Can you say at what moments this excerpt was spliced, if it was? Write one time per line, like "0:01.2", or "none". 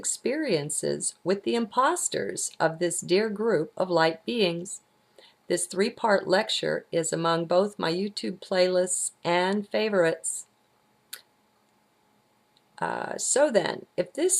0:11.5